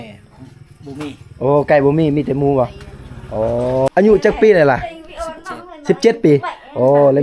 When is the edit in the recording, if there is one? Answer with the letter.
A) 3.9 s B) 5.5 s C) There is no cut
A